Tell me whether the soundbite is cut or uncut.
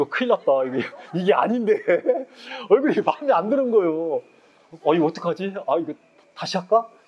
uncut